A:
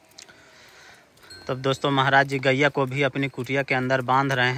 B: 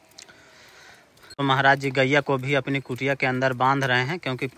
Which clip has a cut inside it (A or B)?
B